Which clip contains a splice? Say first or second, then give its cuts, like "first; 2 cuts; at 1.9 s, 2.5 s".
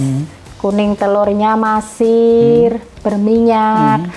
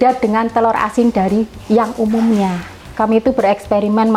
second; 1 cut; at 2.8 s